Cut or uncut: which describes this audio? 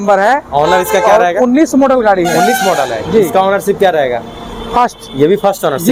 uncut